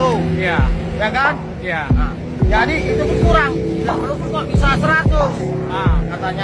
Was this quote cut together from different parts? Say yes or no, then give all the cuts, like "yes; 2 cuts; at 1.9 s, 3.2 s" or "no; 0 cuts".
no; 0 cuts